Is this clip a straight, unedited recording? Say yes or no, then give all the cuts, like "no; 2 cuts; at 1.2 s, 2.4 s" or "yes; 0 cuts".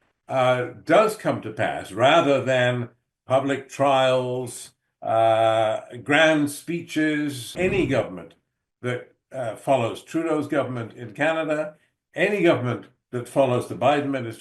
no; 1 cut; at 7.4 s